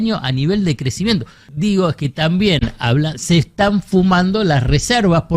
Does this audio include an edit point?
yes; 1 cut; at 1.5 s

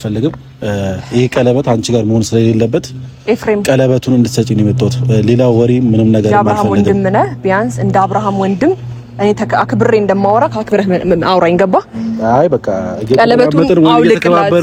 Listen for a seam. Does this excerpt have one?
no; 0 cuts

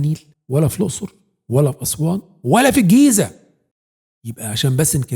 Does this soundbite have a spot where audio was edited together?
yes; 1 cut; at 3.7 s

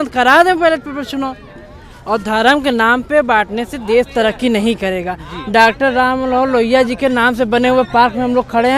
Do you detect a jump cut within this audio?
no; 0 cuts

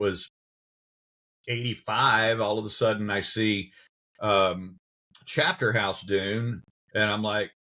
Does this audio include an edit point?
no; 0 cuts

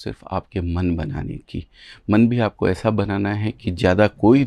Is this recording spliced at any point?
no; 0 cuts

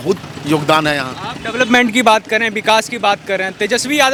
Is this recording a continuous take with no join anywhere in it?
yes; 0 cuts

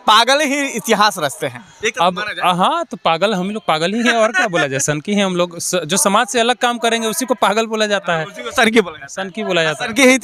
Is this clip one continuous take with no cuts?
yes; 0 cuts

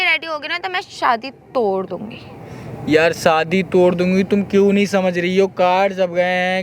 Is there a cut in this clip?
no; 0 cuts

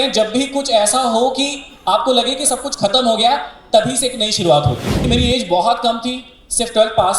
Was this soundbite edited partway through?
yes; 1 cut; at 4.9 s

